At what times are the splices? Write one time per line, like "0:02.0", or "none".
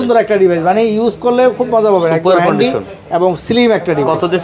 none

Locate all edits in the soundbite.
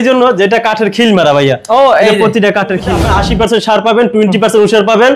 0:03.0

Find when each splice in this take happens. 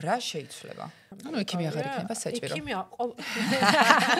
0:01.1

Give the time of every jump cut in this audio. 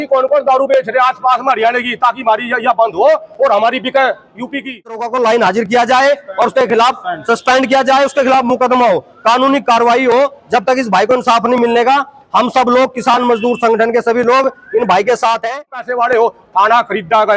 0:05.1
0:15.8

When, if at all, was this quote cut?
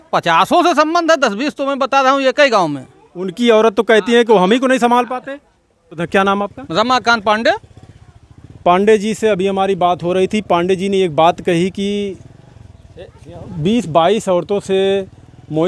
0:06.0

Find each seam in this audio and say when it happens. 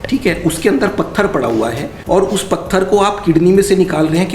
0:01.9

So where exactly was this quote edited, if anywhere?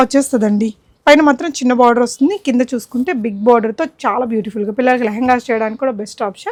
none

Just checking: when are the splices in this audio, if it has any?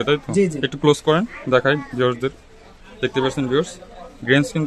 none

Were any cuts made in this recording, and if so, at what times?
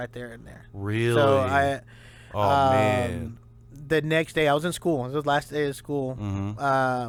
none

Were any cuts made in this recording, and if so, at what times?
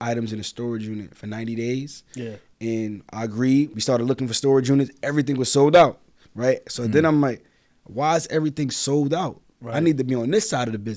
0:03.8

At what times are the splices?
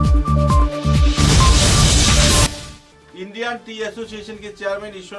0:02.5

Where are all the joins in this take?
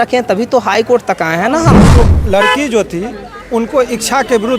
0:01.9

